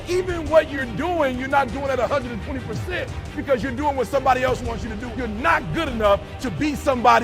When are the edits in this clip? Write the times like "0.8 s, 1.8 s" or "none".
5.0 s